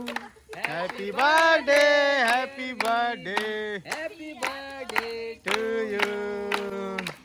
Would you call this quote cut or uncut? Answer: uncut